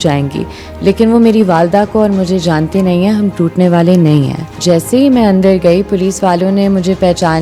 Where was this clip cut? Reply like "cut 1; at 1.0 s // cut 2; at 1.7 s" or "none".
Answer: cut 1; at 4.6 s